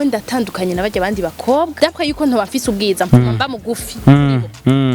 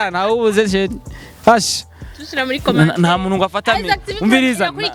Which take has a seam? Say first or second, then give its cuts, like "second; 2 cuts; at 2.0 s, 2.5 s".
first; 1 cut; at 1.7 s